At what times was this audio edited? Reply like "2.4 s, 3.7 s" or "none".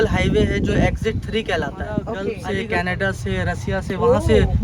2.4 s